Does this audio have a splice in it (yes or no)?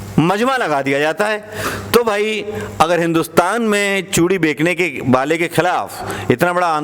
no